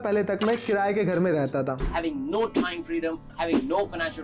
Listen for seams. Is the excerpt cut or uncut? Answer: cut